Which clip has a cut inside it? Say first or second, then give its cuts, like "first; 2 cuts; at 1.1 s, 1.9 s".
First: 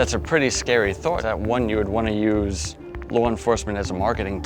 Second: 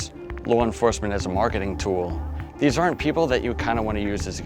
first; 1 cut; at 1.2 s